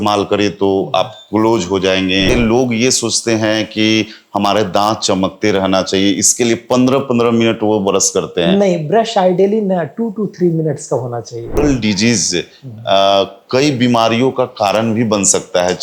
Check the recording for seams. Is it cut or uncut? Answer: cut